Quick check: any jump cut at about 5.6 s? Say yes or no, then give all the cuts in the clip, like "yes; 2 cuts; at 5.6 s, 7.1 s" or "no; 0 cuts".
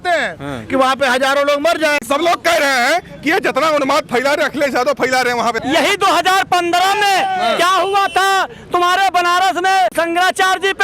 yes; 3 cuts; at 2.0 s, 5.6 s, 9.9 s